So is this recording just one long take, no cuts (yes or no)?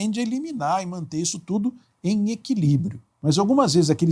no